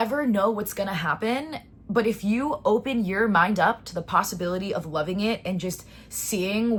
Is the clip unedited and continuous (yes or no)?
yes